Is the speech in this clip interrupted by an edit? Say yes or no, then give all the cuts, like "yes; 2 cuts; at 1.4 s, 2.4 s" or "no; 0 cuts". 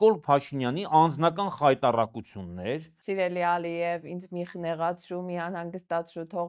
yes; 1 cut; at 2.9 s